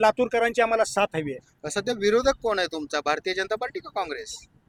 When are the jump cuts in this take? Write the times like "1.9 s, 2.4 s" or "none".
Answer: none

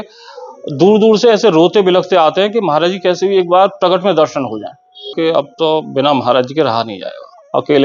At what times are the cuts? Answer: 5.2 s

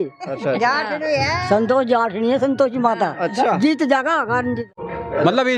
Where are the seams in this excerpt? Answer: 4.7 s

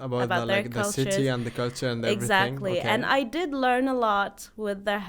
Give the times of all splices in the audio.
none

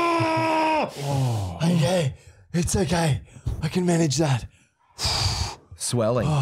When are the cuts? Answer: none

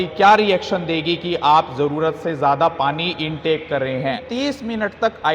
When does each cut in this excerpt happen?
4.2 s

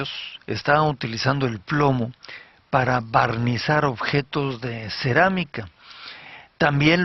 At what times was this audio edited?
4.1 s

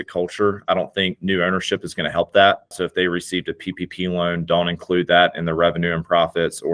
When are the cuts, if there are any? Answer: 2.7 s

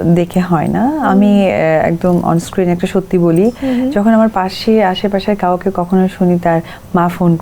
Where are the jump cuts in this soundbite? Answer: none

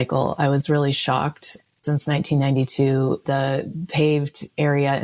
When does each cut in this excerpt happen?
1.7 s, 3.2 s

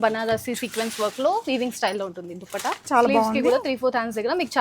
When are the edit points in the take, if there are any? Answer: 2.9 s

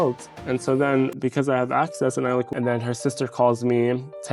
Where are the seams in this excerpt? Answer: 2.5 s

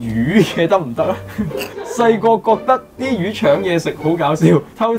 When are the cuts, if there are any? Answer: 1.7 s

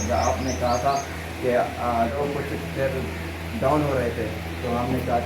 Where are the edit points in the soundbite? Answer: 2.1 s

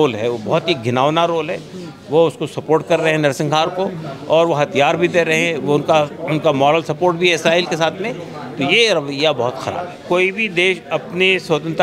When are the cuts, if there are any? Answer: 9.9 s

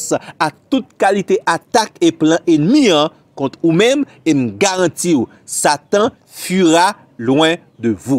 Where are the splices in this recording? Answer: none

